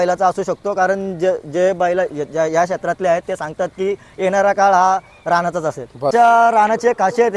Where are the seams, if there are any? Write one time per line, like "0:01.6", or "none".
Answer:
0:06.1